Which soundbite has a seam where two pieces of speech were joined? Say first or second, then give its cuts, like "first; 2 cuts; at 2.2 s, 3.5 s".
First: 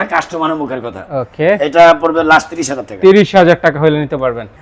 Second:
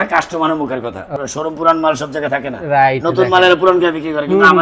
second; 1 cut; at 1.1 s